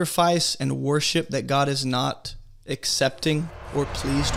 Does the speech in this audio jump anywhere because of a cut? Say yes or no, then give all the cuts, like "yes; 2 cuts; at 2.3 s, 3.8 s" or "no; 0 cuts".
no; 0 cuts